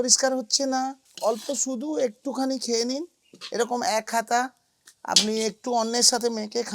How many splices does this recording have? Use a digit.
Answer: 1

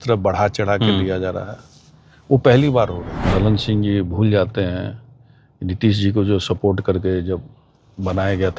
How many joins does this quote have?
1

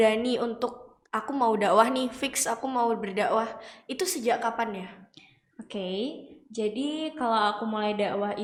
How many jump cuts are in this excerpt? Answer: 0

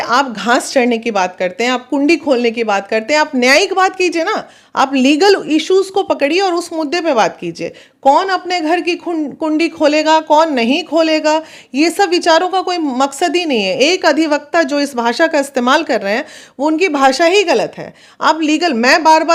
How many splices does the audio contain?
0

